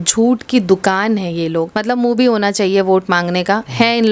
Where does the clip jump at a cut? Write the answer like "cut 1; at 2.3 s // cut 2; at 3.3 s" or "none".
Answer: cut 1; at 1.7 s